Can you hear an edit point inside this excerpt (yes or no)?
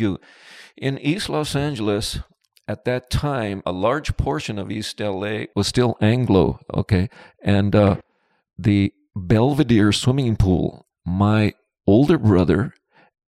no